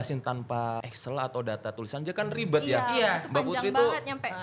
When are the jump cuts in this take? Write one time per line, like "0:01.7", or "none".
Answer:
0:00.9